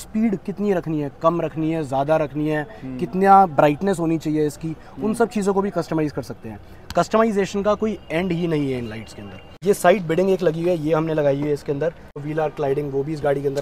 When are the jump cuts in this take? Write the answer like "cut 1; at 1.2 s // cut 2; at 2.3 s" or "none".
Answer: cut 1; at 9.5 s // cut 2; at 12.3 s